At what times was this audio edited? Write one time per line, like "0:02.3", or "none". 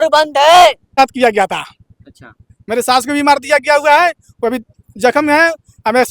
0:00.9